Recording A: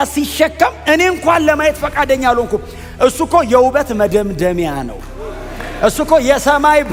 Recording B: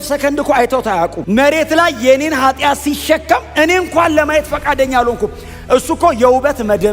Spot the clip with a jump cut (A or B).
B